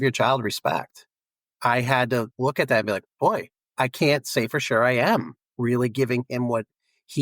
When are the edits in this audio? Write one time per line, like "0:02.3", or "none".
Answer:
0:01.4
0:02.3
0:03.6